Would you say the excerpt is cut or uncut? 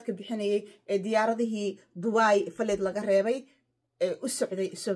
uncut